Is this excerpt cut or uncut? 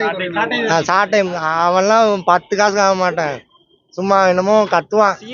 uncut